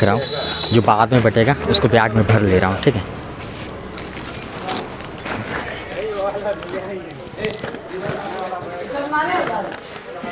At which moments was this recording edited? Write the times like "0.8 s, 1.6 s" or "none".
none